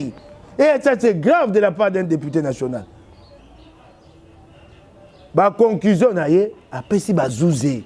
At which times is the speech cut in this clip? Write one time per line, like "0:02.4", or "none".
0:03.4